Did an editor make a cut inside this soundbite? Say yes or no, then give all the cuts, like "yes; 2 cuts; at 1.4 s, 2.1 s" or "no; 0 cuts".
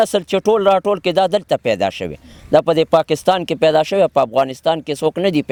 no; 0 cuts